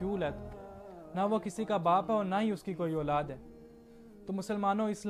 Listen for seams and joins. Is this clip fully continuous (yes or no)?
yes